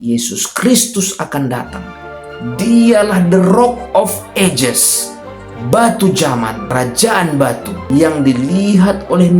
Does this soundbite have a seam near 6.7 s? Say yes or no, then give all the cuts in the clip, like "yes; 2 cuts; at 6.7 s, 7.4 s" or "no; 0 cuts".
yes; 2 cuts; at 6.7 s, 7.8 s